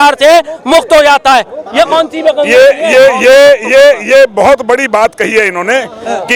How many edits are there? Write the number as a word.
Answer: zero